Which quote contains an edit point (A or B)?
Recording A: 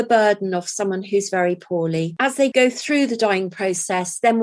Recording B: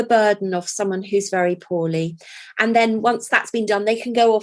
A